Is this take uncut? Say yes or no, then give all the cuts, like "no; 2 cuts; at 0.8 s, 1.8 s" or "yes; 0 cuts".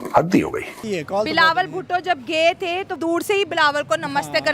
no; 2 cuts; at 0.9 s, 3.0 s